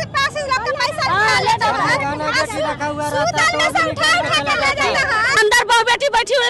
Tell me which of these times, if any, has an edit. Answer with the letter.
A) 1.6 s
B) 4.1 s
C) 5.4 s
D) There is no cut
C